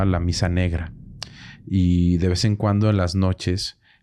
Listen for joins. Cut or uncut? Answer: uncut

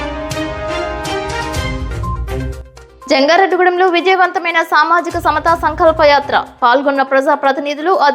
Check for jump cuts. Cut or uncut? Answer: uncut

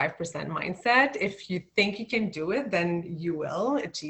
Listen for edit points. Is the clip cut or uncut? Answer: uncut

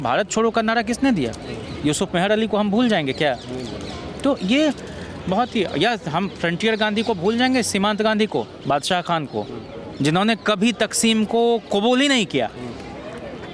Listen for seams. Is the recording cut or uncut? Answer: uncut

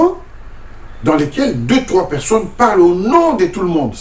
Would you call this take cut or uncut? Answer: uncut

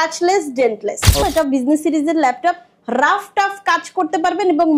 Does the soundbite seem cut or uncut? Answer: cut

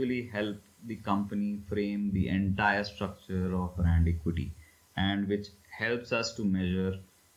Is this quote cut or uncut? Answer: uncut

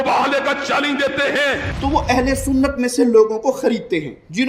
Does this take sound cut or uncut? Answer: cut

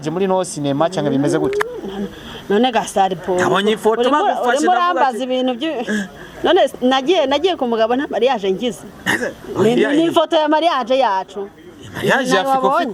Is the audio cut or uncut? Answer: uncut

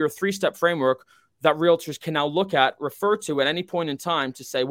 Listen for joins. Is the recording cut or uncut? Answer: uncut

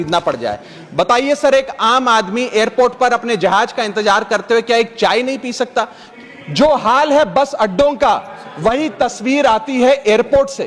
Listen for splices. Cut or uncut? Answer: cut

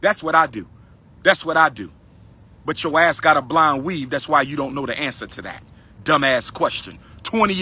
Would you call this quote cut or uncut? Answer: uncut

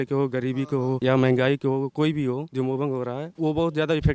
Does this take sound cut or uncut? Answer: cut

